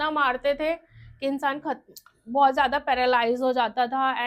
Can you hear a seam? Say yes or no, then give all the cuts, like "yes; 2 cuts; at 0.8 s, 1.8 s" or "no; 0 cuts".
no; 0 cuts